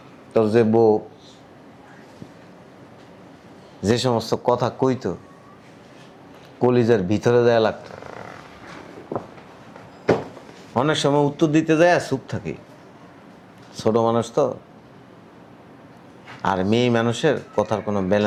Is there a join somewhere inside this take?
no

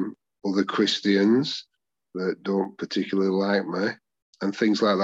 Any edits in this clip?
no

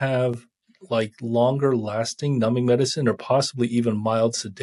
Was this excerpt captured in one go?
yes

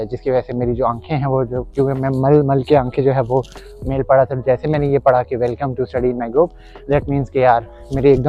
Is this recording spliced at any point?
no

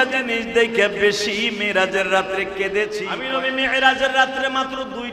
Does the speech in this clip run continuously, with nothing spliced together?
no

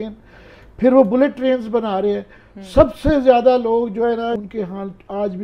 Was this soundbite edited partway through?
yes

